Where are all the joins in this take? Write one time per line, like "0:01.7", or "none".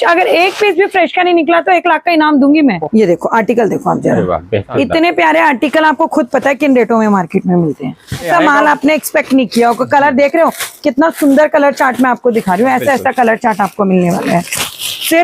0:02.8
0:04.7
0:08.3

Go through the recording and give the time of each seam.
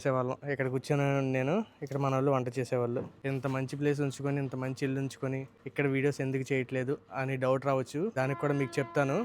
0:03.1
0:05.6
0:08.1

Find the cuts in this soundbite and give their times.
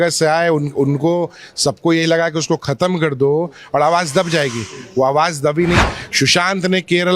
0:05.8

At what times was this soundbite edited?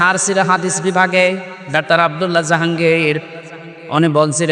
none

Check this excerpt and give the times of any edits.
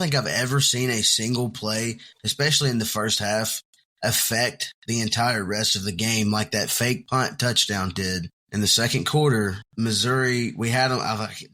0:07.0
0:08.4
0:09.6

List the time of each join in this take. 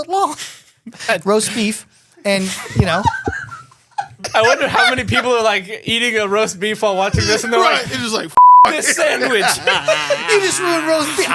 0:04.2

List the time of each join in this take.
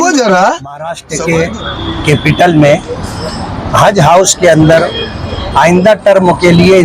0:01.1

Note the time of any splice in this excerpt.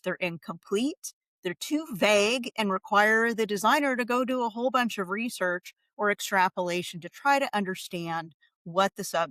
none

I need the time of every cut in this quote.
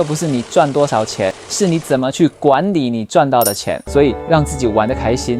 0:01.4
0:03.7

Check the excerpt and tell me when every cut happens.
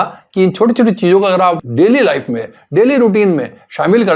0:01.6

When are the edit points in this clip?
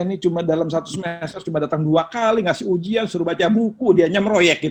none

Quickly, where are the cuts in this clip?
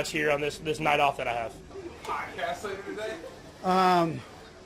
0:01.7

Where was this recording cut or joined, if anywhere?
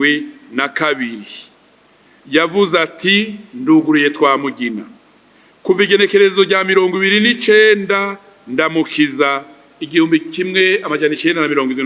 none

